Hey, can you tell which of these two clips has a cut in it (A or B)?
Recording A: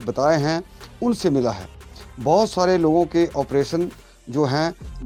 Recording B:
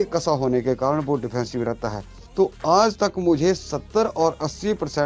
B